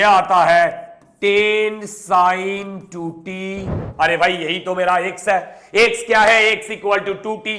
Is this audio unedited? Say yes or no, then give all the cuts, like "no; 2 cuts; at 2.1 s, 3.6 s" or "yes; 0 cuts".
no; 1 cut; at 3.8 s